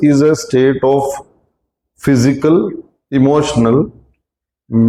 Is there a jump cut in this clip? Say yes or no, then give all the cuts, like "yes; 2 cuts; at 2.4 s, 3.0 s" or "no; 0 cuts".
no; 0 cuts